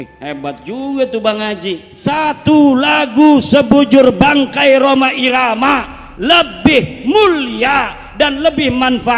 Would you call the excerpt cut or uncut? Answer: cut